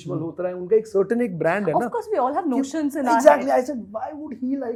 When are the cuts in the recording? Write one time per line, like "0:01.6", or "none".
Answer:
none